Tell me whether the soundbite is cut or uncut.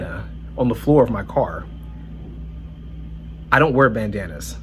uncut